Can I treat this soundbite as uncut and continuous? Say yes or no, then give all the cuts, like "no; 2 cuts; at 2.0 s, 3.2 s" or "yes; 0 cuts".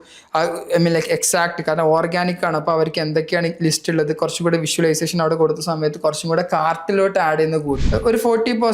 no; 1 cut; at 7.8 s